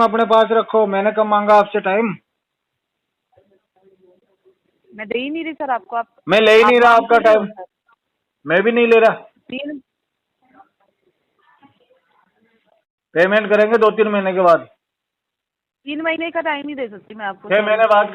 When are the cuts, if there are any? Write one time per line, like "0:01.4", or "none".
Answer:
none